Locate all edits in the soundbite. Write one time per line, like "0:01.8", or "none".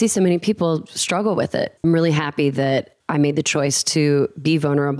0:01.7
0:03.0